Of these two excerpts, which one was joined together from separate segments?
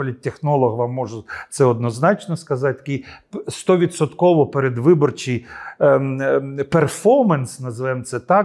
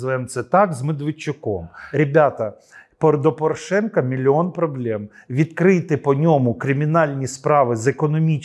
second; 1 cut; at 1.8 s

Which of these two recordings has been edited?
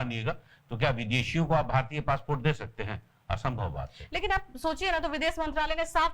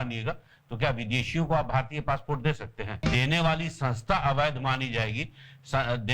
second; 1 cut; at 2.9 s

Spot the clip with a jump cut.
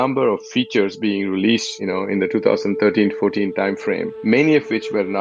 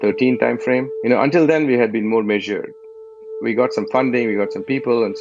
second; 1 cut; at 3.3 s

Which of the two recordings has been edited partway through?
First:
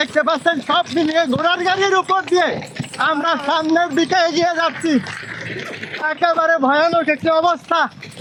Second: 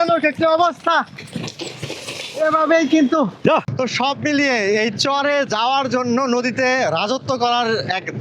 second; 1 cut; at 3.7 s

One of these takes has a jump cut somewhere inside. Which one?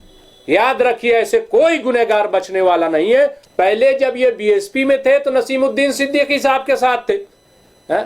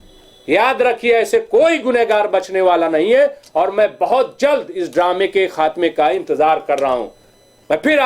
first; 1 cut; at 3.4 s

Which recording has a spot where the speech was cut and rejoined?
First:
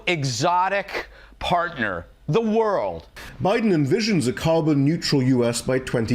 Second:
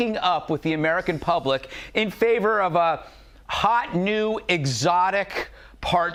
first; 1 cut; at 3.1 s

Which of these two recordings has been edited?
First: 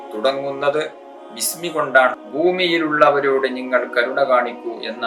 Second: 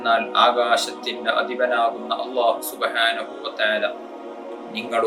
first; 1 cut; at 2.2 s

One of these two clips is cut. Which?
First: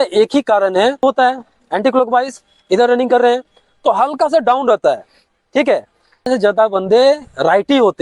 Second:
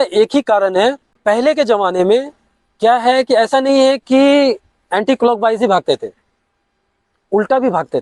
first; 2 cuts; at 1.0 s, 6.3 s

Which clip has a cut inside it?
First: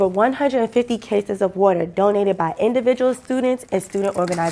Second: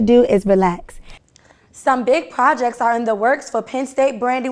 second; 1 cut; at 1.3 s

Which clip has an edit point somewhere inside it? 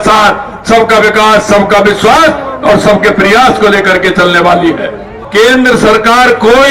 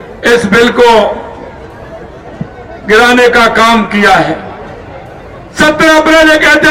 first; 1 cut; at 5.1 s

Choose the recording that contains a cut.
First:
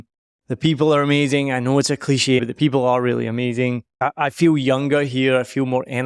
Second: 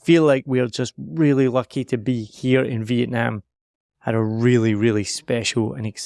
first; 2 cuts; at 2.4 s, 4.0 s

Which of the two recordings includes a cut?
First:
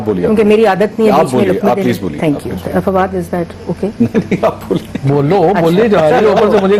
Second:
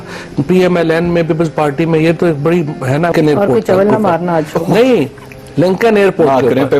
second; 1 cut; at 3.1 s

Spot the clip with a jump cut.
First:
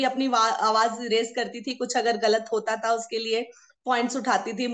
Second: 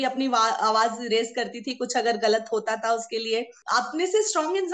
second; 1 cut; at 3.6 s

